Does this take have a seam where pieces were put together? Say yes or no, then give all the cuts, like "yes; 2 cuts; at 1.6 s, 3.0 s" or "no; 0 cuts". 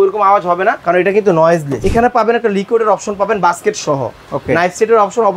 yes; 2 cuts; at 0.8 s, 1.8 s